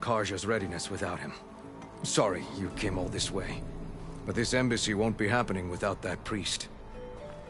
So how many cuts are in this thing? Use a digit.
0